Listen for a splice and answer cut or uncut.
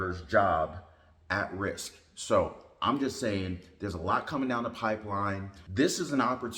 cut